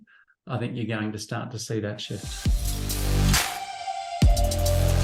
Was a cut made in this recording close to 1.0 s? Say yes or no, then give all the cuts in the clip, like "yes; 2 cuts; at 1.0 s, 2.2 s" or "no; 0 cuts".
no; 1 cut; at 2.3 s